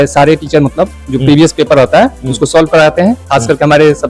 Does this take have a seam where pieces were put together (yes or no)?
no